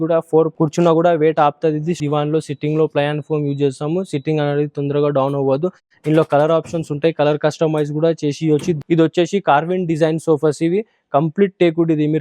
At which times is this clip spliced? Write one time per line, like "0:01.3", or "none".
0:02.0
0:08.8